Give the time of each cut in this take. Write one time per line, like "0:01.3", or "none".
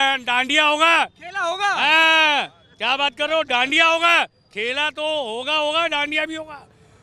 none